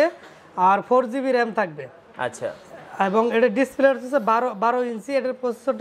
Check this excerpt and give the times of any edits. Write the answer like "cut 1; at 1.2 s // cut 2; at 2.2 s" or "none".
none

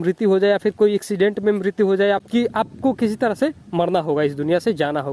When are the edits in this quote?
cut 1; at 2.2 s

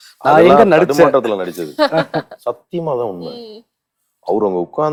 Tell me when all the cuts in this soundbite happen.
none

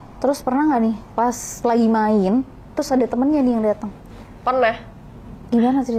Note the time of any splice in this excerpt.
none

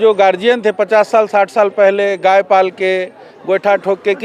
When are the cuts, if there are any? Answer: none

